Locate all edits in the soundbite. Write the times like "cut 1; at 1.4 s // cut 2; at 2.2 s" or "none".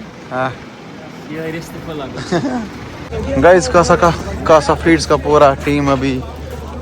cut 1; at 3.0 s